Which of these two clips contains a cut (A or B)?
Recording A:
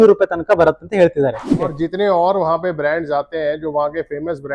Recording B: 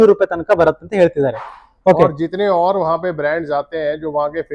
A